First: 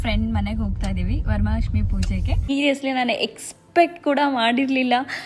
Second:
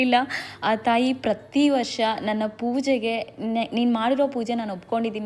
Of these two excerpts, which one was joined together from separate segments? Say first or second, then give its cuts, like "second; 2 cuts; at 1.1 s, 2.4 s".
first; 1 cut; at 2.5 s